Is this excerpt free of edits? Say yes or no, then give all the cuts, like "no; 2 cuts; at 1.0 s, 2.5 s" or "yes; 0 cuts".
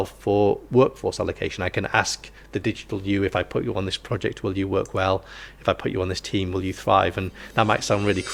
yes; 0 cuts